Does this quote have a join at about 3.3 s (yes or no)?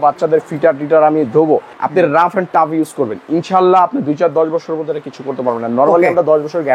no